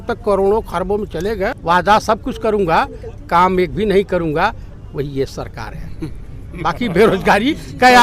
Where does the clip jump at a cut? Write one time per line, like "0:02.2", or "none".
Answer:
0:01.6

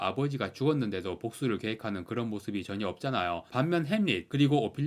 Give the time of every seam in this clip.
0:03.4

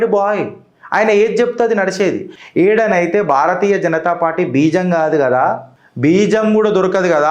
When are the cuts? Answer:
0:02.3

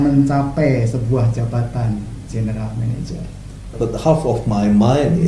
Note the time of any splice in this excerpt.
0:03.7

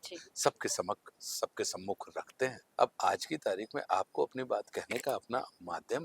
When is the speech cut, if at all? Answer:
0:02.6

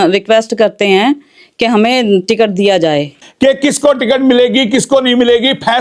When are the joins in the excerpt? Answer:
0:03.2

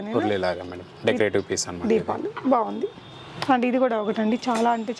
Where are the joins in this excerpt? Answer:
none

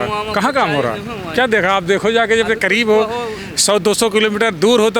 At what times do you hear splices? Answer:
none

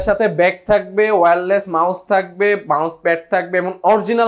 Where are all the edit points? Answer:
none

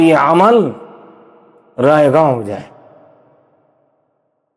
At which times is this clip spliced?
none

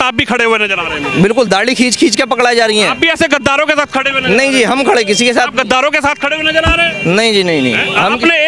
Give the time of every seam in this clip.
none

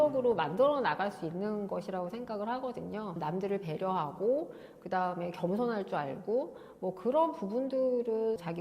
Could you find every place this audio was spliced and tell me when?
0:03.2

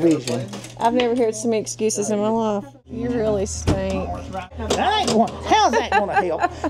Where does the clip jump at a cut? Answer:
0:02.9
0:04.5

